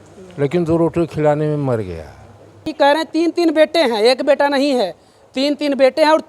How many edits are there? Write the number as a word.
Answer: one